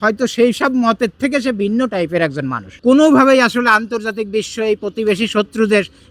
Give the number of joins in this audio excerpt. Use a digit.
1